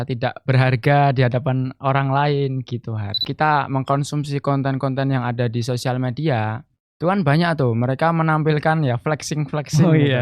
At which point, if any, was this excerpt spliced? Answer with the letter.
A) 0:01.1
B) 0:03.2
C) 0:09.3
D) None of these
B